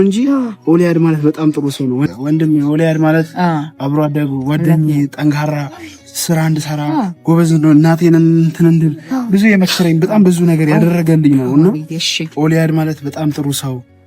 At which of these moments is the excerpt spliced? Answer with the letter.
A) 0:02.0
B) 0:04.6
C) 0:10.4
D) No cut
A